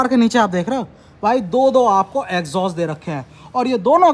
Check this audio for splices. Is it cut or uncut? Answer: uncut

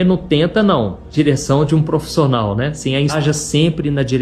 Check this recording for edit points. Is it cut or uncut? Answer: cut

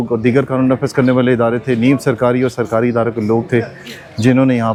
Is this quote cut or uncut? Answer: uncut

